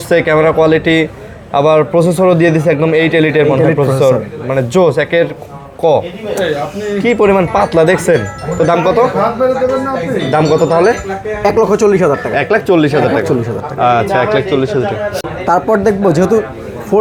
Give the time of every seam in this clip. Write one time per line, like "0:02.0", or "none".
none